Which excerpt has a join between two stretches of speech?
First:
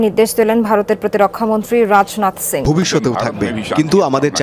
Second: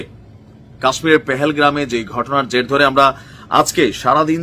first; 1 cut; at 2.6 s

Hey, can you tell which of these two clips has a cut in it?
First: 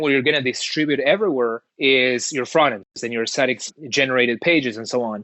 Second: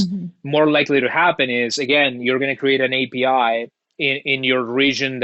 first; 2 cuts; at 1.7 s, 3.0 s

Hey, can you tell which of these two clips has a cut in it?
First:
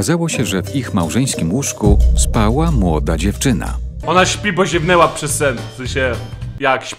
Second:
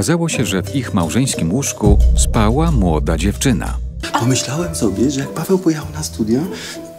second; 1 cut; at 4.0 s

